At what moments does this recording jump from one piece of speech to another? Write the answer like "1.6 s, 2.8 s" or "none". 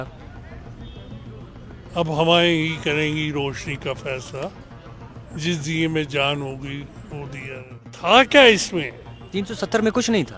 7.9 s